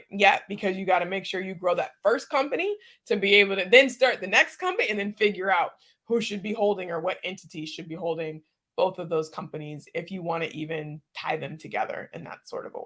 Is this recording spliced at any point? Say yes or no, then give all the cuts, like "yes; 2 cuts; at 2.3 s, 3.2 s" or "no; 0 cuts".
no; 0 cuts